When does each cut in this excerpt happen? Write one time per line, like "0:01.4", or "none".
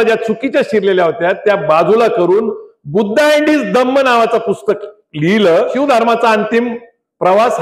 0:05.7